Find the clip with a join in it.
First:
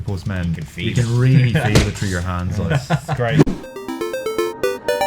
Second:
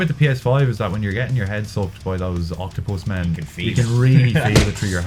first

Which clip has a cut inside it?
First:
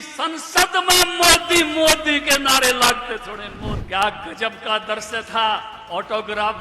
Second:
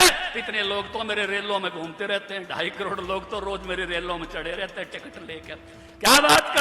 first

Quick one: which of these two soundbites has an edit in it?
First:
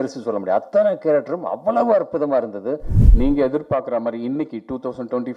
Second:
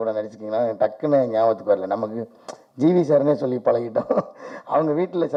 first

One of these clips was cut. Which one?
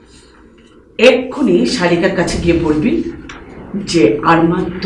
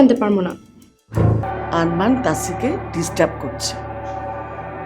second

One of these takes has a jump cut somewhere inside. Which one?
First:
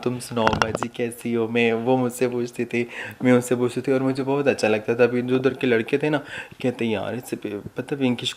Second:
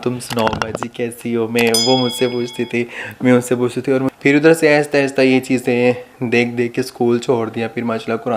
second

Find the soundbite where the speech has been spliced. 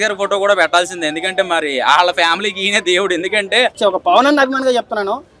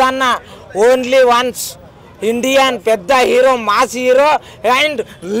first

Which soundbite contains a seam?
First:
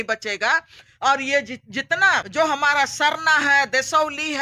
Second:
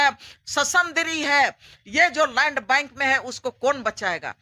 first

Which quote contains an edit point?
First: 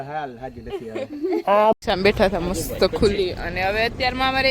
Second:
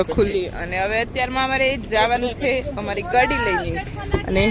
first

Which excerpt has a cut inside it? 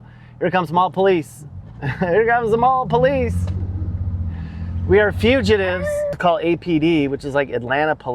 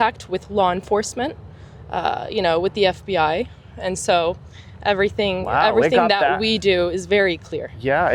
first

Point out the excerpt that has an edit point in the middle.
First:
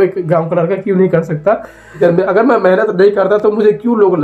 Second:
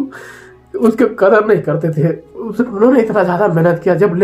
first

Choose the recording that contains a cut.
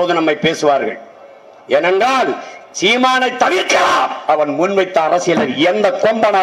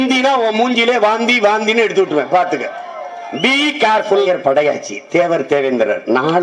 second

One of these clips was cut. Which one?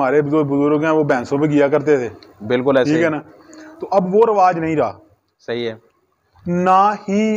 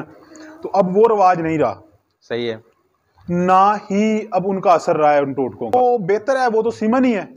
second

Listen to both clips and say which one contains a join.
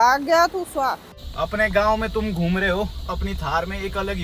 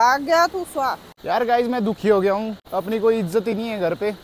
first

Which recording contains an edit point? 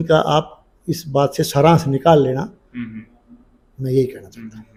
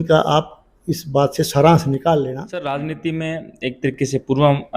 second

